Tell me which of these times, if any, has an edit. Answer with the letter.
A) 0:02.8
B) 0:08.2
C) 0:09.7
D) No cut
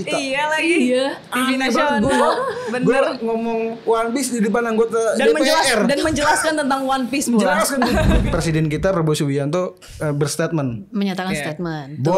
B